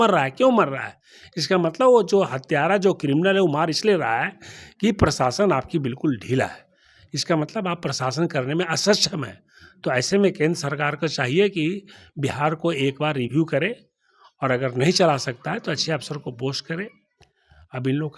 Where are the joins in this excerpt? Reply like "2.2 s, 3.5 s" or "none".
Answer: none